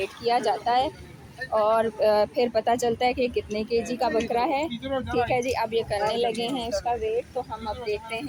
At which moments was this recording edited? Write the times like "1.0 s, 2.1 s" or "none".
none